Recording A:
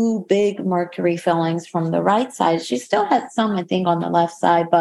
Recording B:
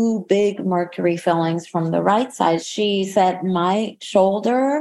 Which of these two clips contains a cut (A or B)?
B